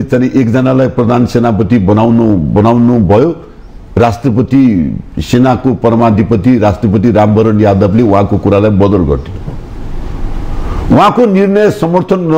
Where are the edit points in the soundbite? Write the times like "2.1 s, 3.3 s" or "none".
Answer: none